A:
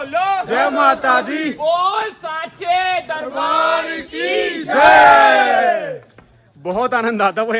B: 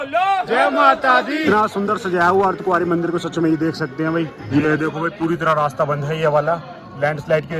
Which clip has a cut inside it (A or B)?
B